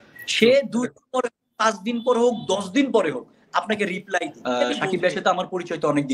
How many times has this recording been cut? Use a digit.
1